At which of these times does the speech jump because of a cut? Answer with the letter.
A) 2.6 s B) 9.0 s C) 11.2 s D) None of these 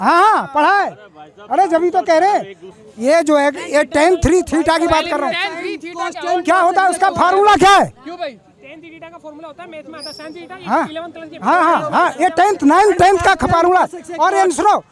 A